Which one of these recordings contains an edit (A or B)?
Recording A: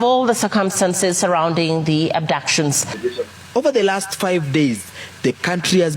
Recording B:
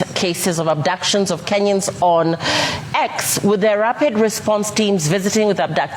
A